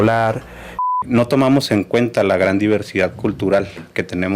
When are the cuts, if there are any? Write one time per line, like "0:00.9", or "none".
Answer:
0:01.0